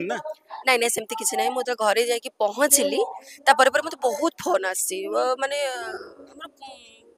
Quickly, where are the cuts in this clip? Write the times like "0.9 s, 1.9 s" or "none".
none